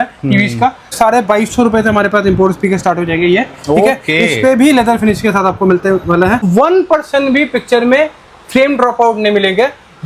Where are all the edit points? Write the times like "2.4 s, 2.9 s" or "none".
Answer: 0.9 s, 6.4 s